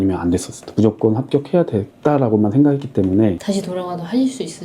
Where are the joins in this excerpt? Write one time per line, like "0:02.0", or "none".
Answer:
0:03.4